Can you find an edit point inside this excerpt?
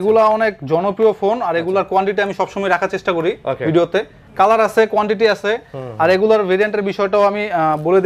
no; 0 cuts

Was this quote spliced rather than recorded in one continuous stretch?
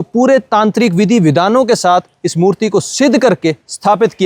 no; 0 cuts

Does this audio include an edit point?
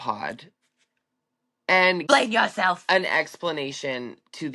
yes; 1 cut; at 2.0 s

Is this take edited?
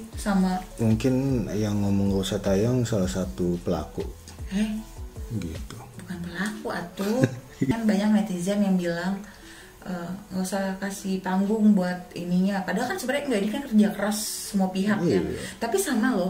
no; 0 cuts

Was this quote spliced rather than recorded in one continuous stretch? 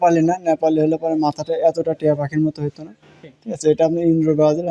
no; 0 cuts

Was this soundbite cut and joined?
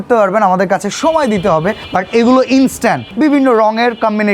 yes; 2 cuts; at 1.8 s, 3.1 s

